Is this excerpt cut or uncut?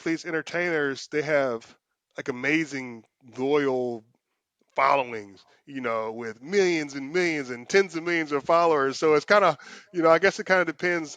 uncut